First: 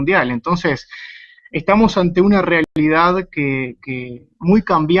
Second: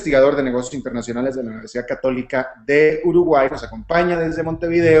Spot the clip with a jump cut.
second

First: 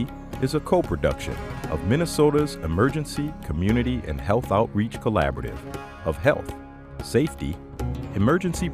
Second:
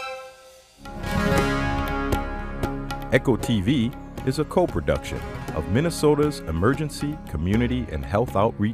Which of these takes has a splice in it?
second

